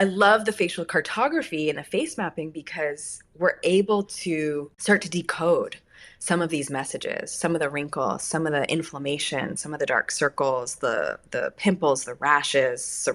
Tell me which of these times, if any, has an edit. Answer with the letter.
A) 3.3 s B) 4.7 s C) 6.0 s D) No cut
B